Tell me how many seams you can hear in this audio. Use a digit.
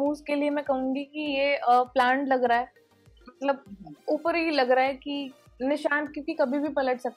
0